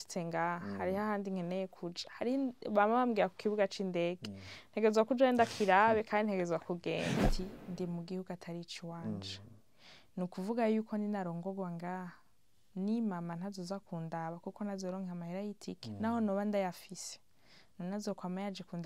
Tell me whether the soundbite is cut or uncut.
cut